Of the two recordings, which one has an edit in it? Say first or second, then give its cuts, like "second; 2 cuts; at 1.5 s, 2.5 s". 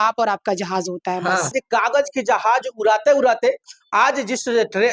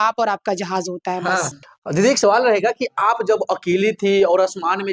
first; 1 cut; at 1.6 s